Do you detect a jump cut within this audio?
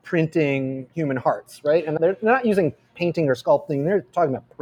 no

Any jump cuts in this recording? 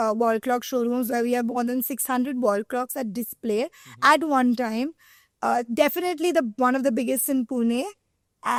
no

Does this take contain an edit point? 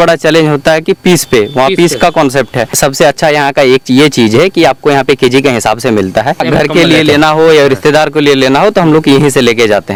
no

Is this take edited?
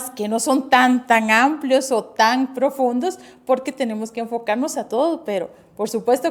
no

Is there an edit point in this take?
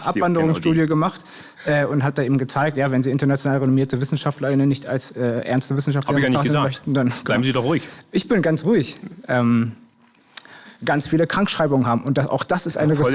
yes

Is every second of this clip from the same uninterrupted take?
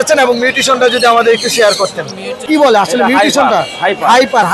no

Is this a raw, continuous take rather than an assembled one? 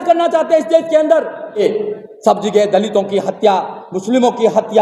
no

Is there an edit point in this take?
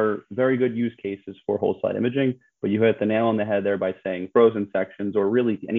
no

